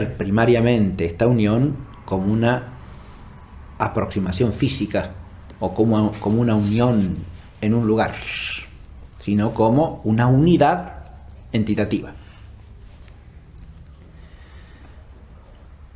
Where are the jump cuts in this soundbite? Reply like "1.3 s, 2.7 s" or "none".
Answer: 1.9 s